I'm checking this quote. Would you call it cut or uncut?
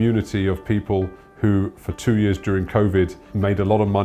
uncut